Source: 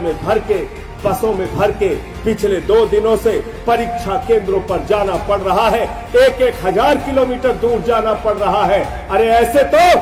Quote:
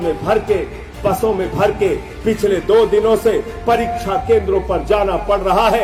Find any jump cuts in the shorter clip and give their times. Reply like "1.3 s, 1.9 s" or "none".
none